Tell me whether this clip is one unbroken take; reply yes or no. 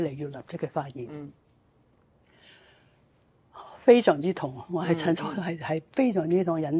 yes